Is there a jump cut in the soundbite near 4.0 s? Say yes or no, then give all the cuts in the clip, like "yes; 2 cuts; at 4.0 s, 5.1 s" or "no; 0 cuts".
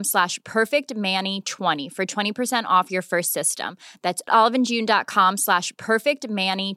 no; 1 cut; at 1.8 s